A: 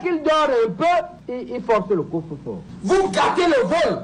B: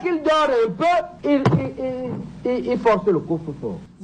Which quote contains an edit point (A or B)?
A